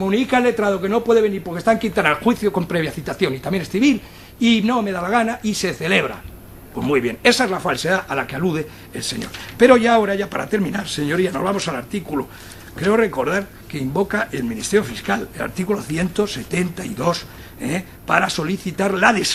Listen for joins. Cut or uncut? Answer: cut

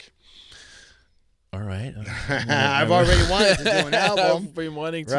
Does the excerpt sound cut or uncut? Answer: uncut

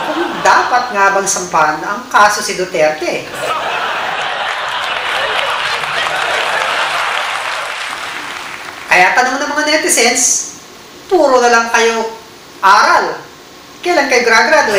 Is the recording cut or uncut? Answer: uncut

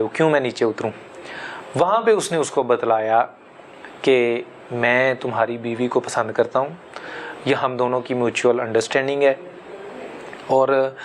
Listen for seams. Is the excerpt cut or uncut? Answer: uncut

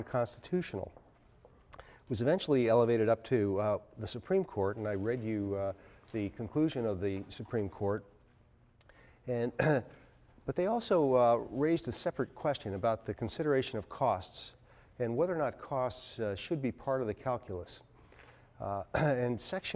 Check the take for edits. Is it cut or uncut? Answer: cut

